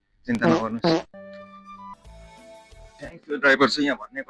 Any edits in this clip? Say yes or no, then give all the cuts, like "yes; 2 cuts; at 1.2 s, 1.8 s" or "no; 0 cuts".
yes; 1 cut; at 1.9 s